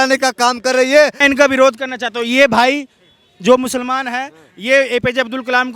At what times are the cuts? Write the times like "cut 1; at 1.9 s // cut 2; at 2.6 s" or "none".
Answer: cut 1; at 1.2 s